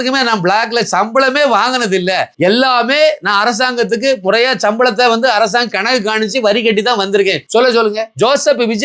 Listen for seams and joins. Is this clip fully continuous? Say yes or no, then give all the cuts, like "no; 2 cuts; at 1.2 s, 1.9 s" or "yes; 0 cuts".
yes; 0 cuts